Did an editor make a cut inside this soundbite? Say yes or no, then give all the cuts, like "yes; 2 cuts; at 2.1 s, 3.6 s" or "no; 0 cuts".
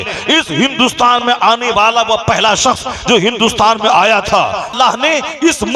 yes; 1 cut; at 4.7 s